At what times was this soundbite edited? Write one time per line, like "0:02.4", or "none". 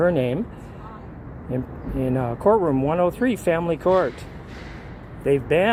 none

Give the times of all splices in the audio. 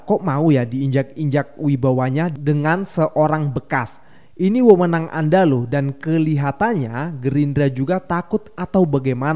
none

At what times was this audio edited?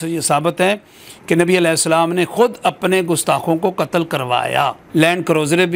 0:04.8

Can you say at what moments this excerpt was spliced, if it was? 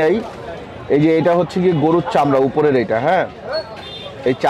none

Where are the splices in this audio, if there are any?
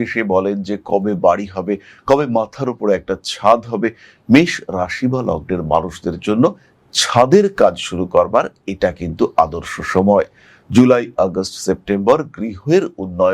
none

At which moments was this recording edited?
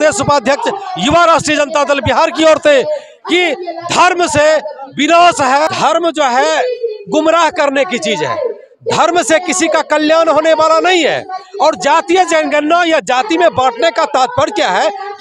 0:05.7

